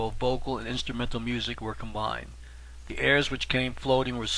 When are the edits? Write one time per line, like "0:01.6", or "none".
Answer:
0:02.8